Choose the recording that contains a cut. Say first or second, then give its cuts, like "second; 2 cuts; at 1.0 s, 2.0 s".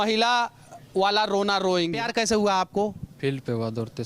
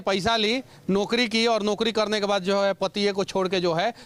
first; 1 cut; at 2.0 s